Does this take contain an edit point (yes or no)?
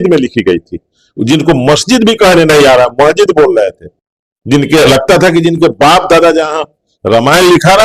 no